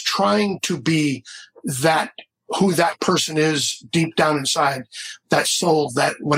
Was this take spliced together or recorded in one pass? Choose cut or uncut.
uncut